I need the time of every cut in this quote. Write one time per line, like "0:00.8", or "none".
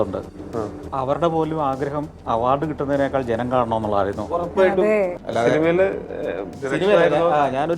0:05.2

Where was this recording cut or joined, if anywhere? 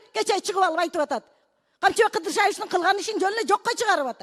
none

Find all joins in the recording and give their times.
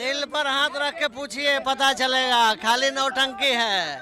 none

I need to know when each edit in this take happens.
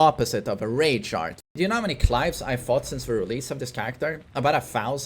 0:01.3

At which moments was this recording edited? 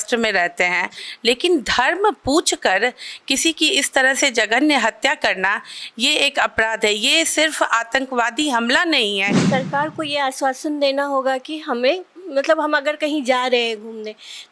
0:09.4

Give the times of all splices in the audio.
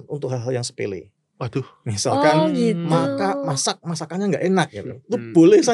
none

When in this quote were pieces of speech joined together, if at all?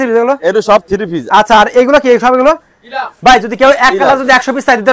none

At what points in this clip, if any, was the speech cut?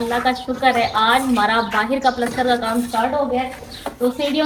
none

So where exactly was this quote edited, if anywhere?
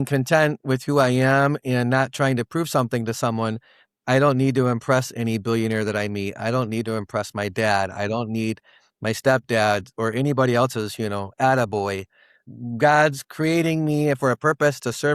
0:12.3

